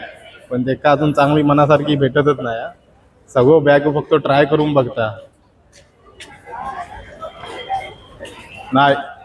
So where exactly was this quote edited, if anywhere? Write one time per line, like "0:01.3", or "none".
none